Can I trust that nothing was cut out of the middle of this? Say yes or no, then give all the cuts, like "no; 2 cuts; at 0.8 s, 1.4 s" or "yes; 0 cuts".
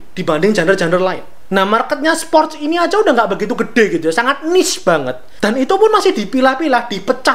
no; 2 cuts; at 1.3 s, 5.2 s